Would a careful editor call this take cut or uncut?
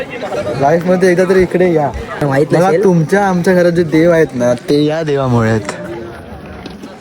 cut